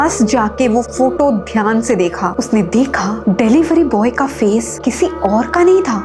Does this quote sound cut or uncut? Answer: uncut